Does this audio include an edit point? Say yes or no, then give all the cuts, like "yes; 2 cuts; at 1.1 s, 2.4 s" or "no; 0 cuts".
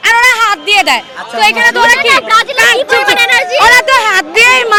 no; 0 cuts